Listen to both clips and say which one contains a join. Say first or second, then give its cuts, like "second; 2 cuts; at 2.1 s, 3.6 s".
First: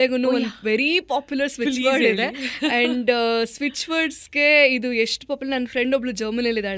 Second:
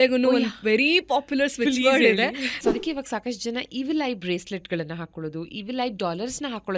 second; 1 cut; at 2.6 s